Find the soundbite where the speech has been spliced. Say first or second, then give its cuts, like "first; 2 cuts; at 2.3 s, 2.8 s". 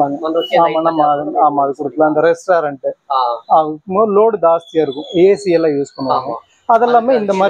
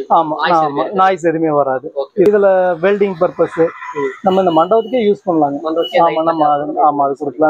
second; 1 cut; at 2.3 s